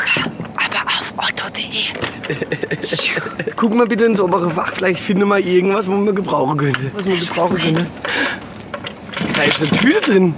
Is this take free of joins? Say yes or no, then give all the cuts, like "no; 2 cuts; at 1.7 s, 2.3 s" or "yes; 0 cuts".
no; 3 cuts; at 3.5 s, 7.0 s, 9.1 s